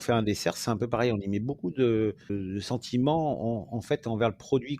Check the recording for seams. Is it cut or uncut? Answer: cut